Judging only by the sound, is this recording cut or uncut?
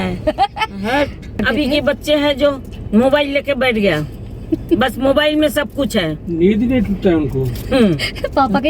cut